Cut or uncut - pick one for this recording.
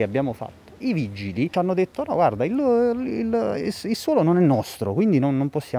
cut